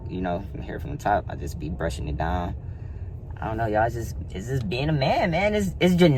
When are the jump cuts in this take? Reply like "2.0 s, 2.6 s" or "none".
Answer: none